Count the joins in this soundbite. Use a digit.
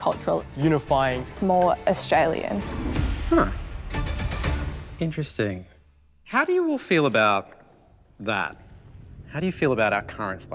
2